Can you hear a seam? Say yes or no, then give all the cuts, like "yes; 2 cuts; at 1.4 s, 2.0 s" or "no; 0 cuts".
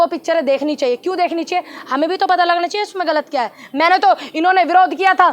no; 0 cuts